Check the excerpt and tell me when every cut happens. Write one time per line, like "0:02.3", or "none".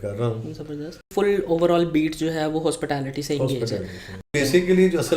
0:01.1
0:04.3